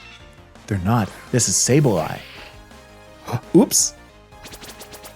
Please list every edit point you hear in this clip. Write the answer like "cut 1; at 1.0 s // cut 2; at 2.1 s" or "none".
cut 1; at 4.1 s